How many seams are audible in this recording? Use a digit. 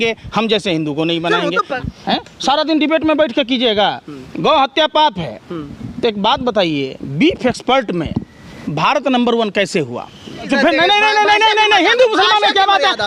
2